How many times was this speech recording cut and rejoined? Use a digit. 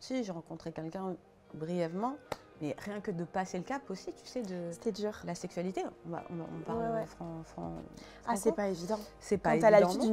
0